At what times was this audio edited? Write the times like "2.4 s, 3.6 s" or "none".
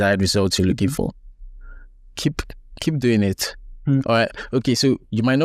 none